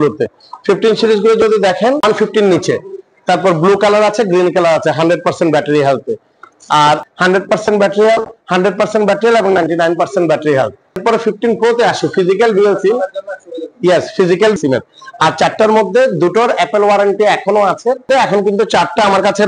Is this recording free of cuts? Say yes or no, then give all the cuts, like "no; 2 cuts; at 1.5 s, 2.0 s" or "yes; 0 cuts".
no; 5 cuts; at 2.0 s, 7.0 s, 11.0 s, 14.6 s, 18.1 s